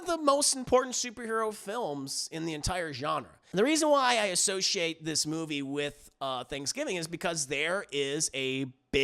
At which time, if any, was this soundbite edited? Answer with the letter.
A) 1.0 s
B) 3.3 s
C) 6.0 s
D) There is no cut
B